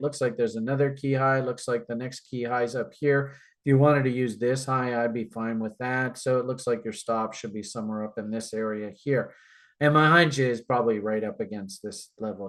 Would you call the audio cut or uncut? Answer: uncut